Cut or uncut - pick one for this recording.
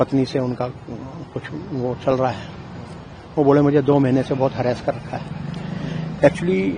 uncut